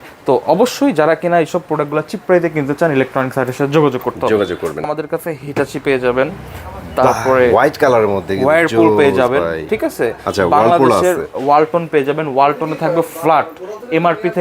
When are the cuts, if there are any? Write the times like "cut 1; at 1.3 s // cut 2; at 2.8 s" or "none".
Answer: cut 1; at 4.9 s